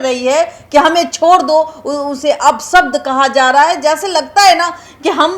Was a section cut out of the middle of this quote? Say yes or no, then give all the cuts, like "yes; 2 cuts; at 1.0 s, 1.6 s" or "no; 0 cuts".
no; 0 cuts